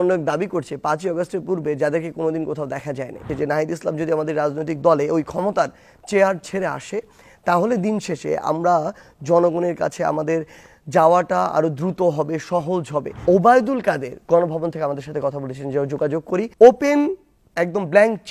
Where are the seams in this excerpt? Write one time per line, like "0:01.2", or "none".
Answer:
0:03.3
0:13.1
0:16.5